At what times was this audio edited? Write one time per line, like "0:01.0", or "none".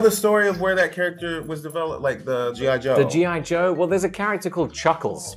none